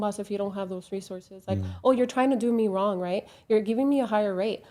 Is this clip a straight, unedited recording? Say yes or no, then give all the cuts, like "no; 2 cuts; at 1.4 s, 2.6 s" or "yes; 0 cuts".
yes; 0 cuts